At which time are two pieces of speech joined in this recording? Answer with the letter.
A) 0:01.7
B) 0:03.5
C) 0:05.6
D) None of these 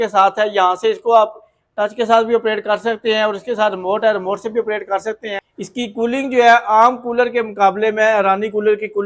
C